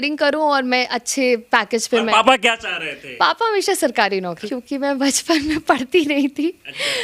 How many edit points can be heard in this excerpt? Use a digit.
1